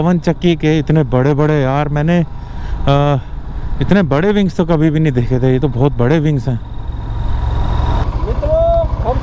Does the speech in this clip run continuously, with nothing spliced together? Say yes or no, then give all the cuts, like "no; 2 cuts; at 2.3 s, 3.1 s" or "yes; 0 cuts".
no; 1 cut; at 8.0 s